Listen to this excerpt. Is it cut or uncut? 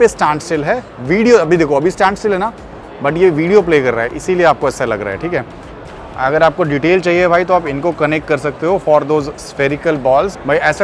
uncut